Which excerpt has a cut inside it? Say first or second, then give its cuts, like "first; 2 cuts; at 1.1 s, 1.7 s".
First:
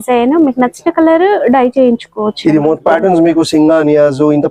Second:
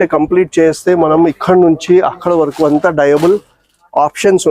first; 1 cut; at 2.8 s